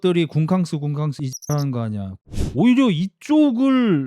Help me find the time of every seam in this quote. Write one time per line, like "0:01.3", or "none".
0:02.2